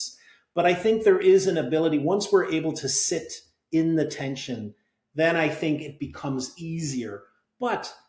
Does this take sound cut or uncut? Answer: uncut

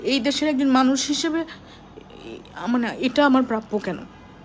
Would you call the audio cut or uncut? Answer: uncut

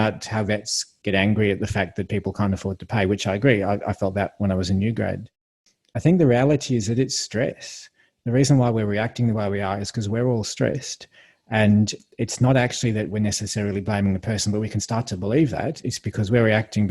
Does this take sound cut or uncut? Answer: cut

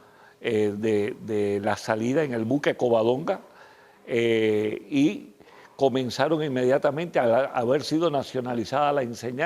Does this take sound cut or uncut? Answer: cut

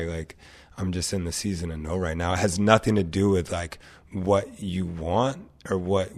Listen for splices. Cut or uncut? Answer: uncut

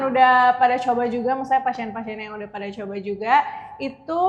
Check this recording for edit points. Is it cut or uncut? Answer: uncut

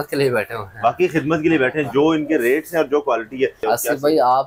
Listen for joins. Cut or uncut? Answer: cut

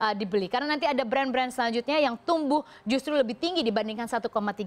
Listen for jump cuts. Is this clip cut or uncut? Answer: cut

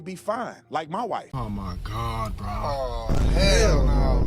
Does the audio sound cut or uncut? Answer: cut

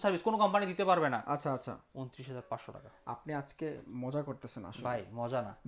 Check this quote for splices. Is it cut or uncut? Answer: cut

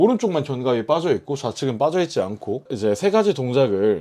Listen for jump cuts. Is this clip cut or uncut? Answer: cut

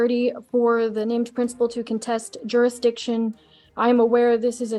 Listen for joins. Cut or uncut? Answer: uncut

